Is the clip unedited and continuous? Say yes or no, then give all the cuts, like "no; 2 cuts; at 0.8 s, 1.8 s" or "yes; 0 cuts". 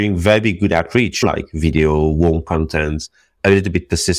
no; 1 cut; at 1.2 s